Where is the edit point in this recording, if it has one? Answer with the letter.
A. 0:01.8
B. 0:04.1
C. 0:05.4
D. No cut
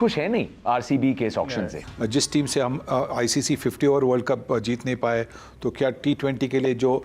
A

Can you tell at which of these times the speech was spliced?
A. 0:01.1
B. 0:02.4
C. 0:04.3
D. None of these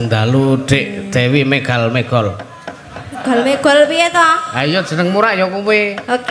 D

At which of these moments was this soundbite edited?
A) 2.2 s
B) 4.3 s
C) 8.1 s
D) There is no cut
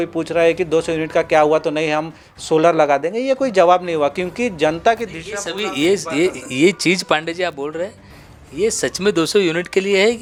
D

